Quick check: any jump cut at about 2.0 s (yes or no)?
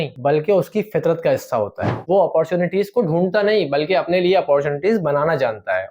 yes